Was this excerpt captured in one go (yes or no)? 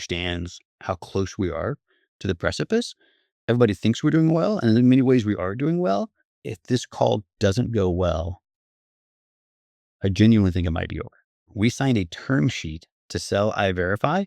no